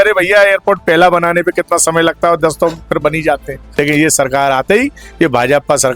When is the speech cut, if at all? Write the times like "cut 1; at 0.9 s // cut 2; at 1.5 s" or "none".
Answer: cut 1; at 3.6 s